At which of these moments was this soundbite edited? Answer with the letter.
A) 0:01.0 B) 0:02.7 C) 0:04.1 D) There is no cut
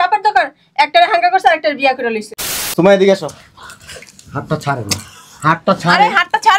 B